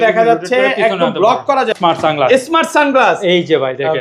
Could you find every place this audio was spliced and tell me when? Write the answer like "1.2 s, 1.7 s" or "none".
1.7 s